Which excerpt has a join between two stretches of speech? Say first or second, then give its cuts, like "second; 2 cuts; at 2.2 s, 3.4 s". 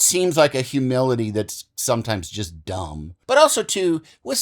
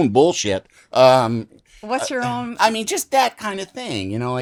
first; 1 cut; at 3.1 s